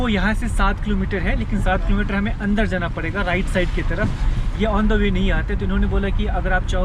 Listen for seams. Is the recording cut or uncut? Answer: uncut